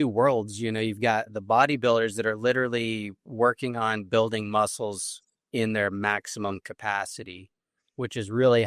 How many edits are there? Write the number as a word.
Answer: one